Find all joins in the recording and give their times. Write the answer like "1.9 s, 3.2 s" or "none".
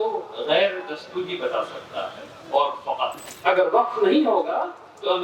3.3 s

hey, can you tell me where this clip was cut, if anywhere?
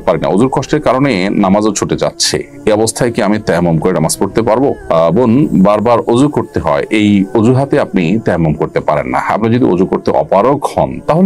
none

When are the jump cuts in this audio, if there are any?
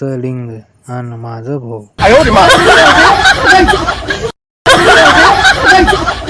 1.9 s

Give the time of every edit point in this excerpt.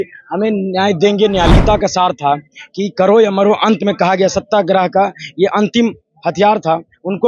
1.5 s

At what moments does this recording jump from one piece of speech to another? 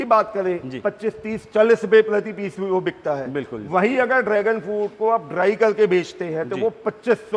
none

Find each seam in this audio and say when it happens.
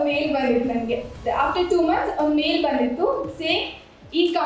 1.1 s

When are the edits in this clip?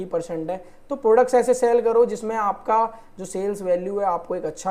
none

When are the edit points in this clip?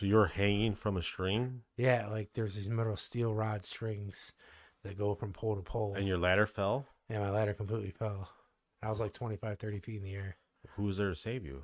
none

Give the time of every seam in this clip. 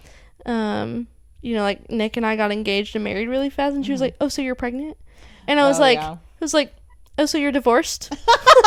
none

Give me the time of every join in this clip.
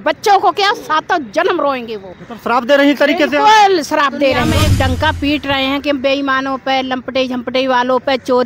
4.5 s

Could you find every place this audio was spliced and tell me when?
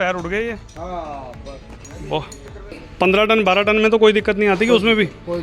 2.8 s

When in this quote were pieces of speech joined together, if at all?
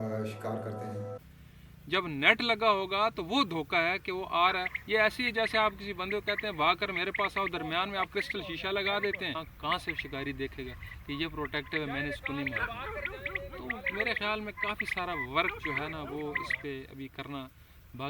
1.2 s, 9.4 s

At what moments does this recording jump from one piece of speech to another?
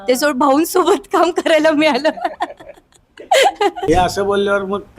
3.9 s

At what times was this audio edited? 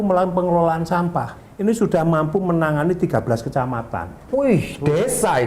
1.4 s

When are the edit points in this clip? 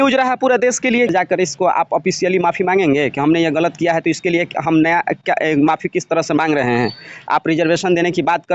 1.1 s

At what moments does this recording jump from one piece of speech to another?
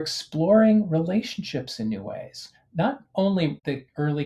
none

